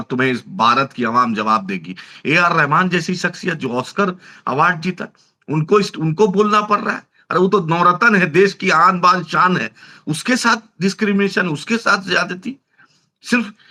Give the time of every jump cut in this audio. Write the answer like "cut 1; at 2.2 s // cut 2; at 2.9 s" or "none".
none